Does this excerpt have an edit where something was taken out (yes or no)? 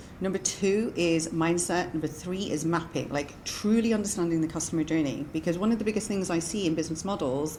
no